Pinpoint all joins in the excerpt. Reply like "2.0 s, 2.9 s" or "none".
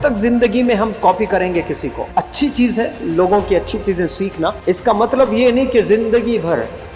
2.0 s, 4.6 s